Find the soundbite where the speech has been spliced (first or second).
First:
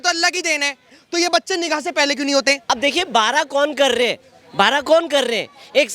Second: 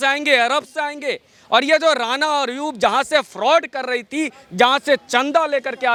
first